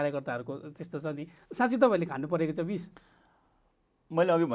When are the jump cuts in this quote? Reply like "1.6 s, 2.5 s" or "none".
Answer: none